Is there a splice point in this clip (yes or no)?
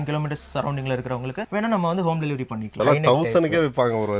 yes